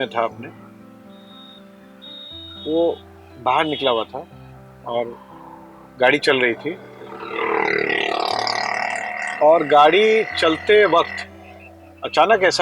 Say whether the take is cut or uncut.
uncut